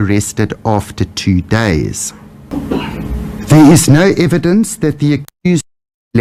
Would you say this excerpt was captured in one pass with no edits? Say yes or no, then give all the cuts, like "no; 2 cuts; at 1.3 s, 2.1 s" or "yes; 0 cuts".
yes; 0 cuts